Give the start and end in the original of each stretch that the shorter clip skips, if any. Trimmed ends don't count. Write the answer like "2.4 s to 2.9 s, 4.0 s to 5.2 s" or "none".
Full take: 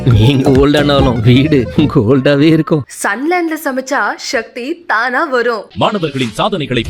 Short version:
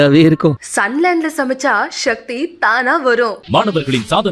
none